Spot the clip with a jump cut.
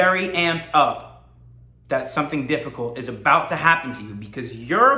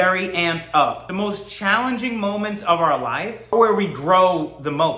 second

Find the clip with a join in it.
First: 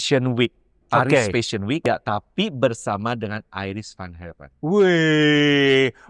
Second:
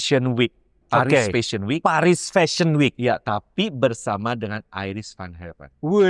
first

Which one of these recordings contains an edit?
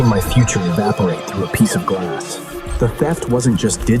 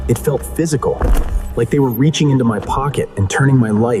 first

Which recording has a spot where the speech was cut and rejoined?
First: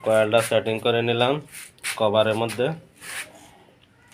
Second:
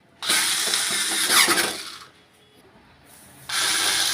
second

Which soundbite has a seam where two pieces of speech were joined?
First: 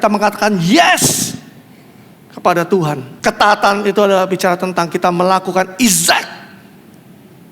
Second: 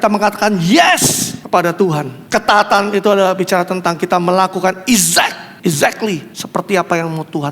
second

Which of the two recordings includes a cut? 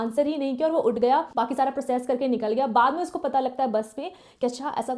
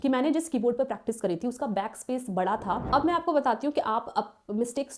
second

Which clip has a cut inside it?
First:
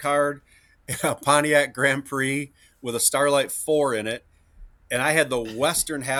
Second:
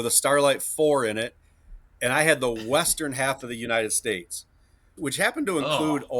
second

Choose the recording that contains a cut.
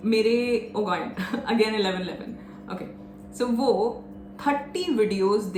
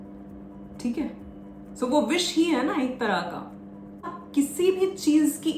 second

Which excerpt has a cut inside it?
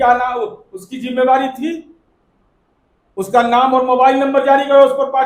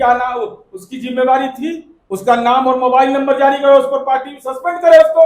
second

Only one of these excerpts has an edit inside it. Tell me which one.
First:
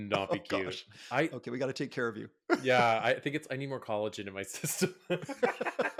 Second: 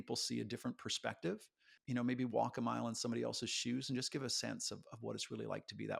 second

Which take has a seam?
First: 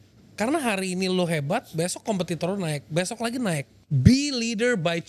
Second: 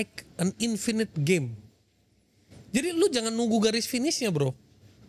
first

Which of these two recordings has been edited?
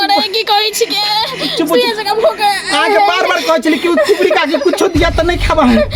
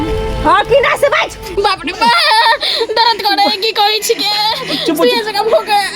second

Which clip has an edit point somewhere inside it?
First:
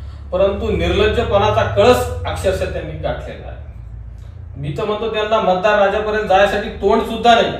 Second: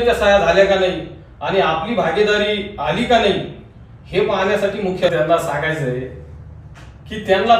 second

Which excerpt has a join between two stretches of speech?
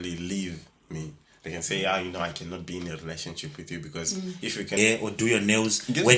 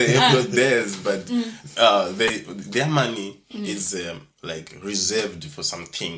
first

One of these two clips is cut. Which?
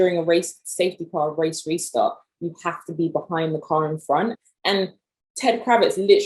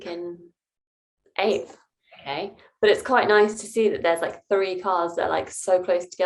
first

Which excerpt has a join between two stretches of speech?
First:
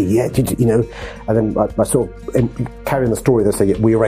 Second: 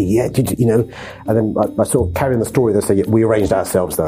second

